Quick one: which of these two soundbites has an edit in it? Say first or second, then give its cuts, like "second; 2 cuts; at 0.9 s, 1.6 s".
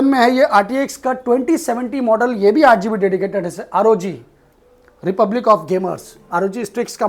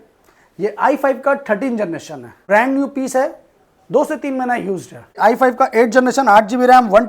second; 2 cuts; at 2.4 s, 5.2 s